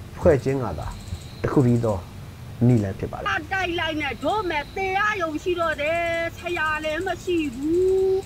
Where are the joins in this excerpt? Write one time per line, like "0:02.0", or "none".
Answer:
0:03.2